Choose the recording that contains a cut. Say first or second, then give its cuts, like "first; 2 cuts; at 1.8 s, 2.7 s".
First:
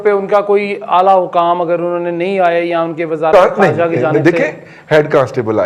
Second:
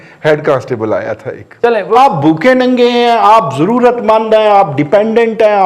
second; 1 cut; at 2.0 s